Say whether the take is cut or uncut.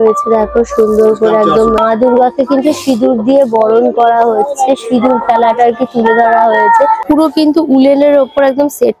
cut